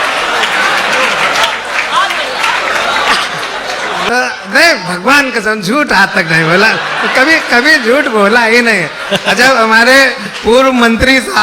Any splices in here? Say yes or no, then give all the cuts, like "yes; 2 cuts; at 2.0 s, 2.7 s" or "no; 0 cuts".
yes; 1 cut; at 4.1 s